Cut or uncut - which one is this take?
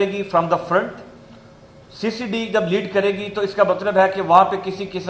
uncut